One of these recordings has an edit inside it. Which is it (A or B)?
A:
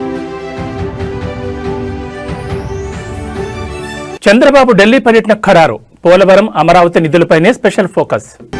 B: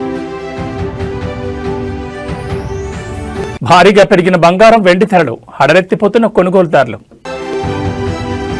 B